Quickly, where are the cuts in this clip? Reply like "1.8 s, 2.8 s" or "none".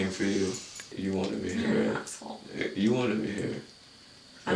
0.9 s